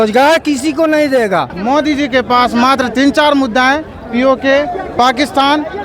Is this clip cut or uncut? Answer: cut